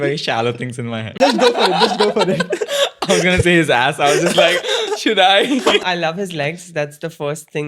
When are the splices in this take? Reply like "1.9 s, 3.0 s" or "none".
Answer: 1.2 s, 5.8 s